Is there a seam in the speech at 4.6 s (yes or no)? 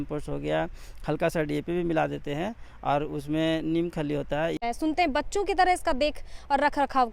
yes